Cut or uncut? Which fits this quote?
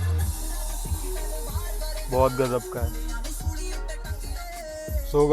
cut